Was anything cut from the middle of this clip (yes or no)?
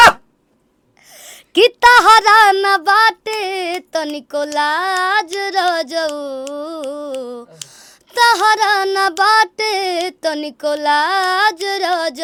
no